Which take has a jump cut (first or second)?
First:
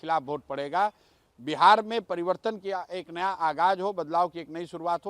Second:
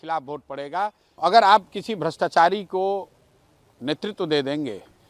second